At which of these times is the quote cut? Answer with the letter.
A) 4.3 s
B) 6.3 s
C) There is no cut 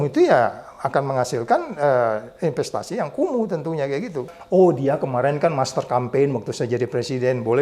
A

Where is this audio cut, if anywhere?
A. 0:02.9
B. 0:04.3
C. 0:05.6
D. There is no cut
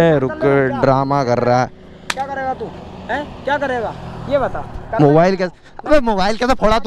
A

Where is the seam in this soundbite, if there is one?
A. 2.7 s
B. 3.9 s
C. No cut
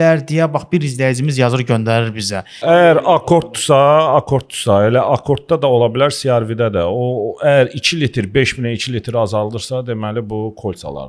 A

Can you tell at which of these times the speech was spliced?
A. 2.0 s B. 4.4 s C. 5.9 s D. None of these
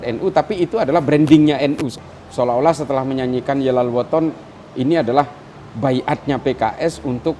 A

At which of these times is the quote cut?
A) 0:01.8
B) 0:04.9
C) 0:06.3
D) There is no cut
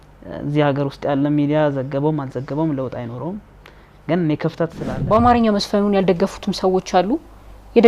B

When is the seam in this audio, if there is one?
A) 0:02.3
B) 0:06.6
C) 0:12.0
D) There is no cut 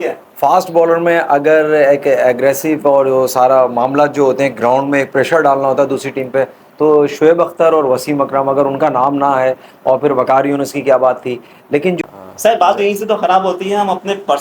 C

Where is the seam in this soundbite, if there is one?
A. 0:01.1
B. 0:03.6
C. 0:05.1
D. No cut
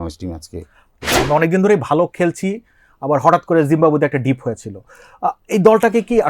A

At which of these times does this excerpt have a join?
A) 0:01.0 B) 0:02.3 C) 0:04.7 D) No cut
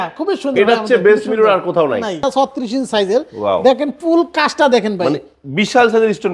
B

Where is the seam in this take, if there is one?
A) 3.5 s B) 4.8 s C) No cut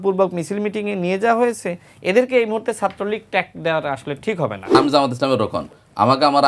B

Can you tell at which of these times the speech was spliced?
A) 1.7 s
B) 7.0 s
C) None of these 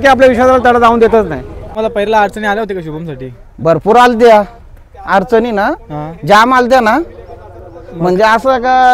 A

